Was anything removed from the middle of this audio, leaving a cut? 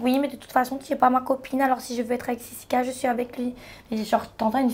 no; 0 cuts

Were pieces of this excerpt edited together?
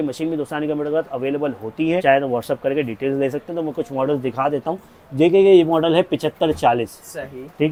no; 0 cuts

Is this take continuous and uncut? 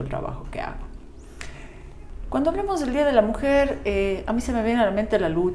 no; 1 cut; at 2.1 s

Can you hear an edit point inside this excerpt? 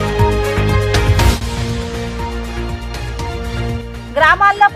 yes; 1 cut; at 1.1 s

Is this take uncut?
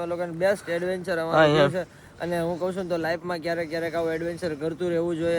yes; 0 cuts

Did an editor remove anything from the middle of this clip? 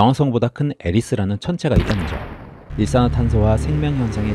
yes; 1 cut; at 2.7 s

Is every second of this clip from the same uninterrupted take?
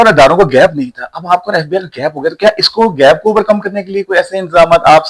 yes; 0 cuts

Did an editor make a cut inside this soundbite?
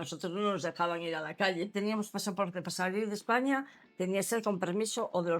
yes; 1 cut; at 1.7 s

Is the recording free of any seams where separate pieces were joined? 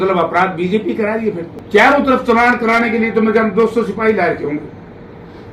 no; 1 cut; at 1.5 s

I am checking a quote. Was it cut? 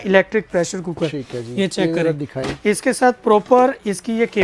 no; 0 cuts

